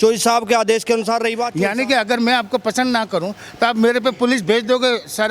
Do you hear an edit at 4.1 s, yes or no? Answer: no